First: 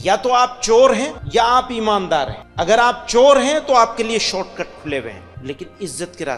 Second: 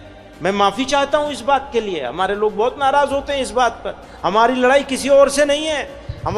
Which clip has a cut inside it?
first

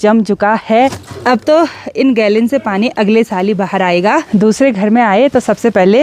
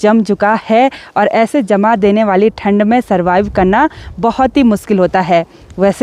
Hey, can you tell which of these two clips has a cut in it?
first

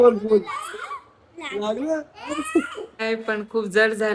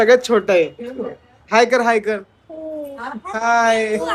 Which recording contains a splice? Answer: first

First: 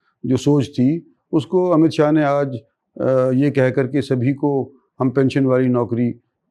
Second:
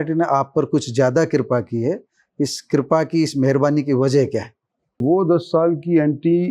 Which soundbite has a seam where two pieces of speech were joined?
second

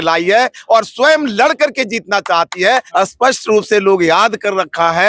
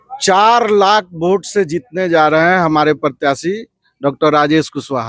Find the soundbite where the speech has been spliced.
first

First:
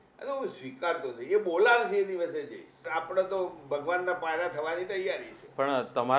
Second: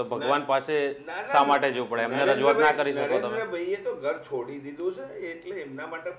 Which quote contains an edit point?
first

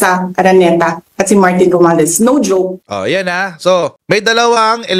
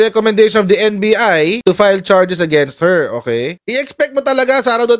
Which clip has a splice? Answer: second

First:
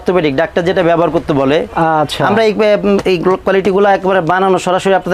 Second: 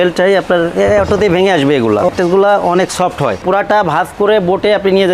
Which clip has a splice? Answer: second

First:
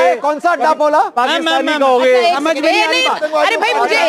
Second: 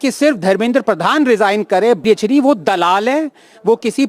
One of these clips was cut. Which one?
second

